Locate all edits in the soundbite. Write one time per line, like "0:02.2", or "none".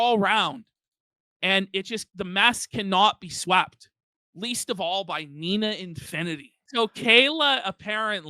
0:06.6